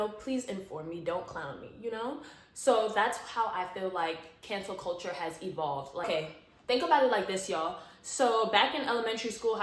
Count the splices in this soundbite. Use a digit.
0